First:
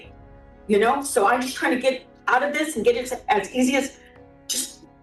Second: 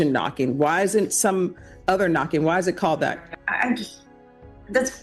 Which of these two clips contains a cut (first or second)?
second